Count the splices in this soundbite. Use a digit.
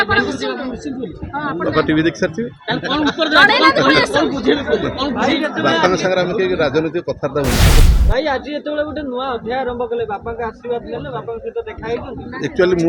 1